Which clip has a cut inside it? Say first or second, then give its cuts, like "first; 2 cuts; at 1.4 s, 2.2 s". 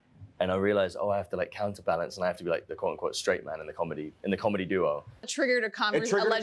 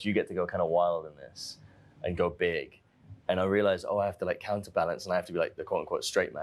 first; 1 cut; at 5.3 s